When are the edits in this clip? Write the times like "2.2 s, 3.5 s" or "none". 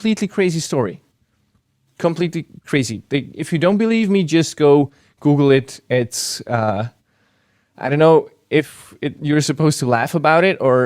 none